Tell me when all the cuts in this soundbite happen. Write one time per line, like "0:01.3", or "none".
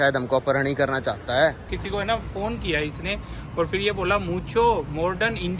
0:01.7

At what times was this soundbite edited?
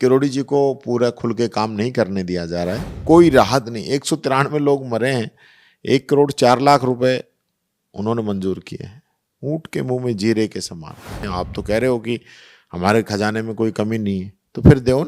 0:02.9
0:11.3

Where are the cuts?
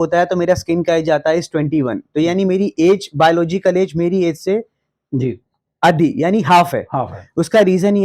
none

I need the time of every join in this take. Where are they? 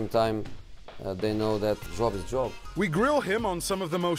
0:01.8

